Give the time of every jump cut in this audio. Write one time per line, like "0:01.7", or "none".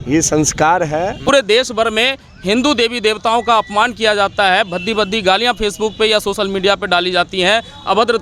0:01.3